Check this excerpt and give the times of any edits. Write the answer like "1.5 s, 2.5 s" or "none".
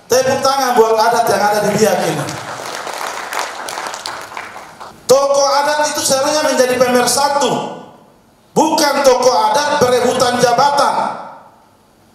5.0 s